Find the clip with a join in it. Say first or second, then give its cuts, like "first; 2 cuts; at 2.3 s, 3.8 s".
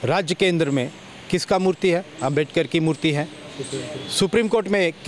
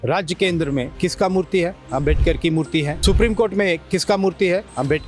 second; 2 cuts; at 0.9 s, 3.0 s